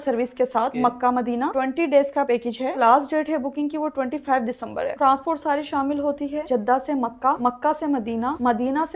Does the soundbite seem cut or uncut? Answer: cut